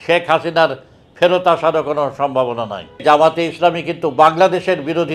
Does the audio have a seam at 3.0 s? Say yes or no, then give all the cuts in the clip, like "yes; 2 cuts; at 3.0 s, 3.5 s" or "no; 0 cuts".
yes; 1 cut; at 3.0 s